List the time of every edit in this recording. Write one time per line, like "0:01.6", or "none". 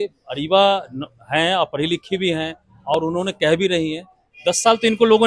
none